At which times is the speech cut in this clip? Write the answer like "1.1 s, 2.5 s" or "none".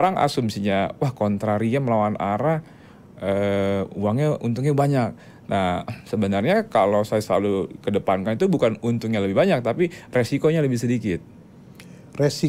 none

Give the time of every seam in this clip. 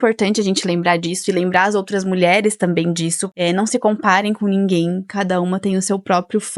3.2 s

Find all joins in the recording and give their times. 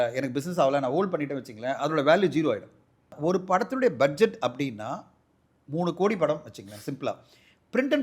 3.1 s

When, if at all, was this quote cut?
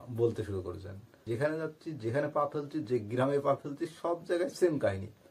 1.2 s

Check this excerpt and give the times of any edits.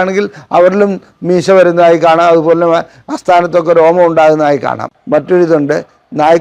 4.9 s

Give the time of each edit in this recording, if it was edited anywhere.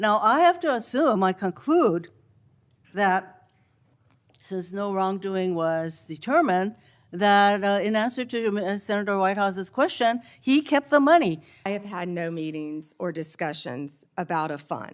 11.7 s

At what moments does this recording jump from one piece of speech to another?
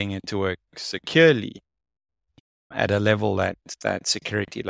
none

